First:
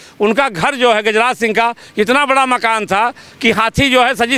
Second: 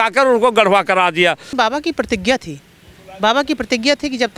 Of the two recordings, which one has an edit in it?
second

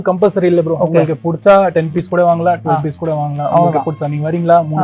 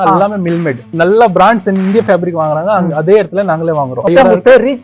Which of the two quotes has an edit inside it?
second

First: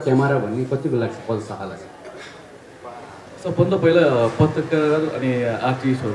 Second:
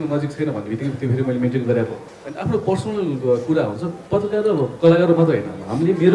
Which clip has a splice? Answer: second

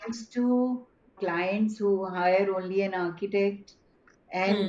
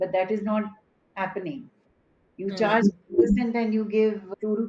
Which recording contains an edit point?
first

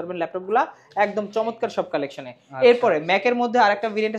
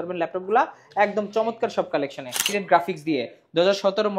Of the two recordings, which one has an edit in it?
second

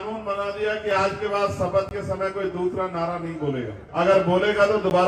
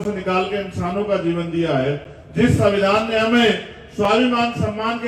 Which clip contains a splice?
first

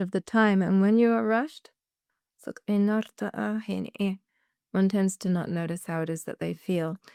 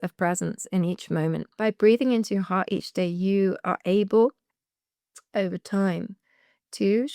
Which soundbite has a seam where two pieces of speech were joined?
second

